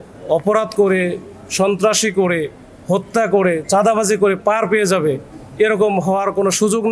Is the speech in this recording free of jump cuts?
yes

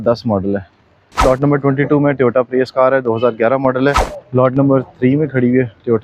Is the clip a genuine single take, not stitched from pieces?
no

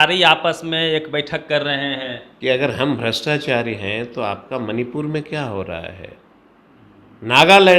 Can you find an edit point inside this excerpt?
yes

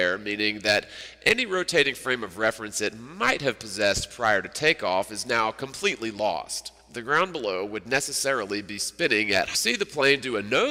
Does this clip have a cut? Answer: no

